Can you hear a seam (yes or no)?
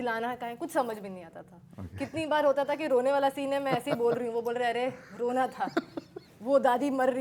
no